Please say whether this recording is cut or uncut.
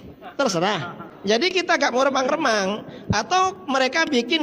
cut